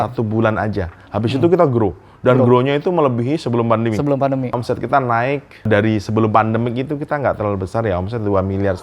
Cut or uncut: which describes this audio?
cut